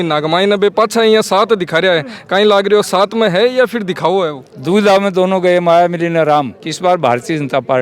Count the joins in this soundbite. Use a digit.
2